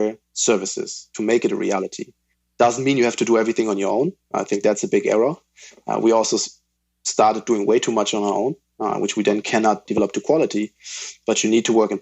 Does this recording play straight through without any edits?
no; 1 cut; at 9.8 s

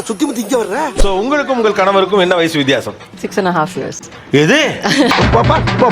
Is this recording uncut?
no; 1 cut; at 1.0 s

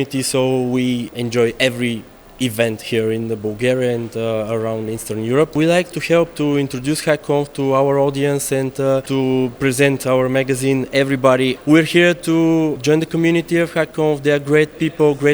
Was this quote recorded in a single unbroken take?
no; 4 cuts; at 1.1 s, 5.5 s, 9.1 s, 11.6 s

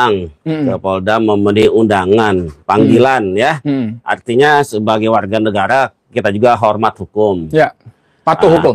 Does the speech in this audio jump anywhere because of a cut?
no; 0 cuts

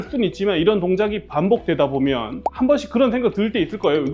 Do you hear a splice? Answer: yes; 1 cut; at 2.4 s

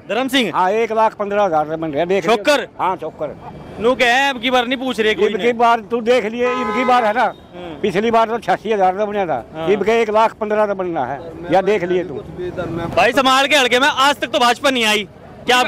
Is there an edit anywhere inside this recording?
yes; 1 cut; at 12.9 s

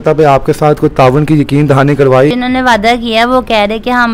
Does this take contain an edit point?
yes; 1 cut; at 2.3 s

